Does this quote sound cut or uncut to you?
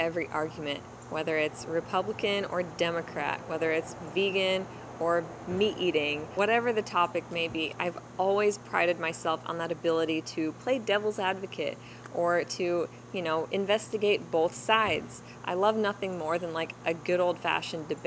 uncut